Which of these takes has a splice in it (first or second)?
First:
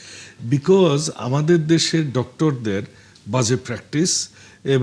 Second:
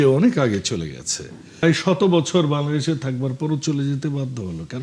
second